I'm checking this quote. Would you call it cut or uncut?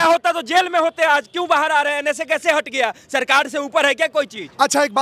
uncut